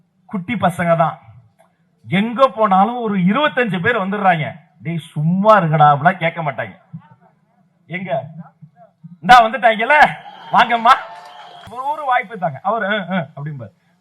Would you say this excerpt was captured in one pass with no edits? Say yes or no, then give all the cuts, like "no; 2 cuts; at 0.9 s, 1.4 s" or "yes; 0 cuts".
no; 1 cut; at 11.7 s